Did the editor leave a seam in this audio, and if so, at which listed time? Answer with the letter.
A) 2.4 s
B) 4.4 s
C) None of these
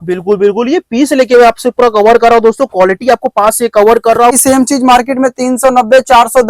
B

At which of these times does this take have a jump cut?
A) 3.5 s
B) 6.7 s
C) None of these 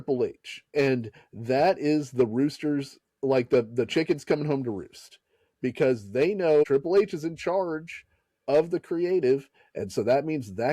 B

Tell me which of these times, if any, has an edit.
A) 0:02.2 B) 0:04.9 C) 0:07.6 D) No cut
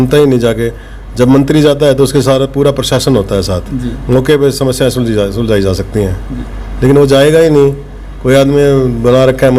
D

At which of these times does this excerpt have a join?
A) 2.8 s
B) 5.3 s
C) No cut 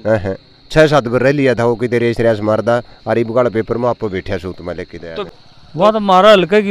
B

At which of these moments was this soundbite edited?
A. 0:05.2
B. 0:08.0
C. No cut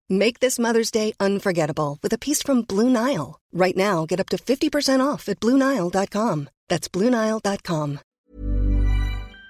B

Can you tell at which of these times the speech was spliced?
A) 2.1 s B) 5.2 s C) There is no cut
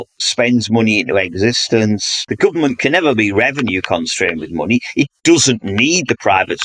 A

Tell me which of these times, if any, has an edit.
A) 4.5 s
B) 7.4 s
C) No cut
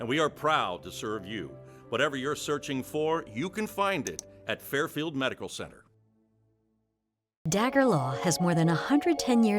B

